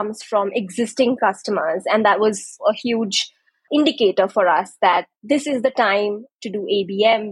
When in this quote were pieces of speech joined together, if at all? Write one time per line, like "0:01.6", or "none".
0:02.6
0:03.7